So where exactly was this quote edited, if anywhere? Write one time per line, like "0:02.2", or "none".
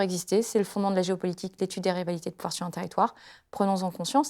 none